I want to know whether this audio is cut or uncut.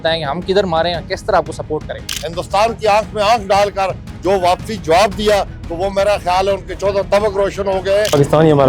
cut